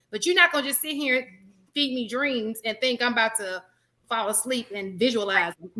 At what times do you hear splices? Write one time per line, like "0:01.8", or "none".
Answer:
none